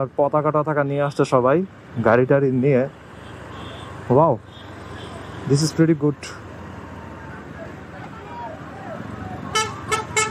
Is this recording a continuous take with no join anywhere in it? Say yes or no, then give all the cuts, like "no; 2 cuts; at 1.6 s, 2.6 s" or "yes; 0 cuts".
yes; 0 cuts